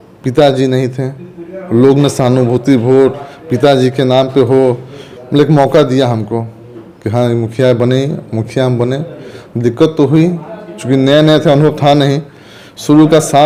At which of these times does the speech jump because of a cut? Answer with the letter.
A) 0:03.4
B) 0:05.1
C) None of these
C